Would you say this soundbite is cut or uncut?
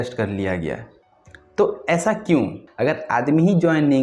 cut